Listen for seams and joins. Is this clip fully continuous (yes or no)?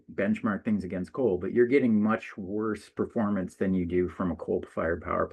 yes